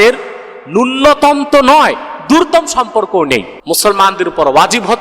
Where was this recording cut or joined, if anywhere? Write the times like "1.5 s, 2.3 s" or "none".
3.5 s